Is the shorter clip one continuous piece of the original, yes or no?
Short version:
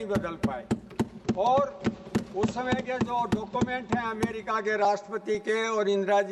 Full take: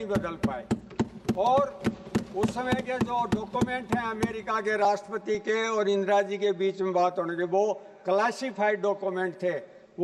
yes